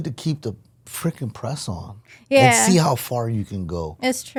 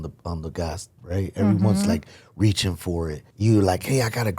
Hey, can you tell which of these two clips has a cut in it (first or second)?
second